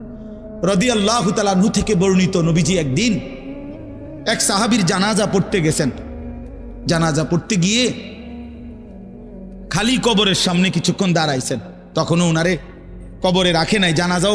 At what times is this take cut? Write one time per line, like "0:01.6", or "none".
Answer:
0:08.0
0:09.4

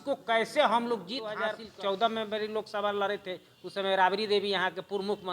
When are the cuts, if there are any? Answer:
0:01.5

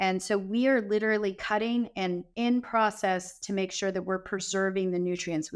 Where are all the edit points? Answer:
0:02.3

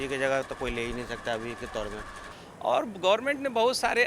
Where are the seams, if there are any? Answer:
0:02.2

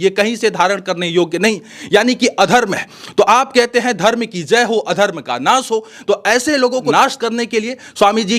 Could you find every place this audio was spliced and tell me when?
0:06.9

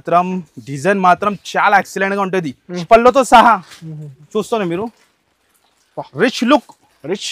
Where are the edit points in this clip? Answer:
0:02.8

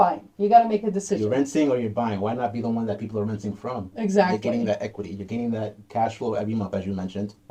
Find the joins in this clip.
none

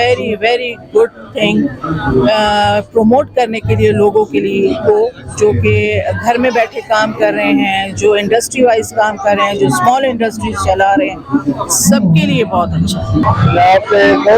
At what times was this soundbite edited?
0:13.2

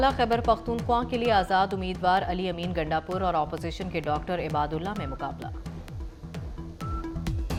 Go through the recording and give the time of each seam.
none

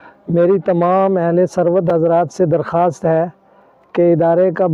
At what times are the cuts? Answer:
none

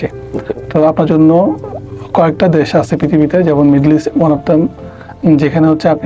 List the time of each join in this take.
none

